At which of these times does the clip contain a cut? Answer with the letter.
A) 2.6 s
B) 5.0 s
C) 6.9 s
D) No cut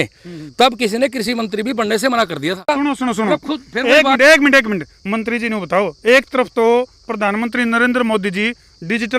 A